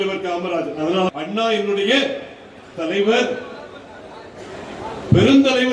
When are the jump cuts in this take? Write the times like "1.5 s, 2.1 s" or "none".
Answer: 1.1 s